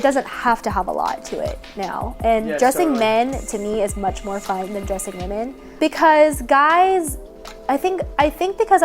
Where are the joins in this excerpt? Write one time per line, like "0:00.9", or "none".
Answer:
0:05.6